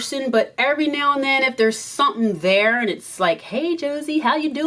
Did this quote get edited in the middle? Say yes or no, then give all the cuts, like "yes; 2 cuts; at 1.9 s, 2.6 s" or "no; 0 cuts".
no; 0 cuts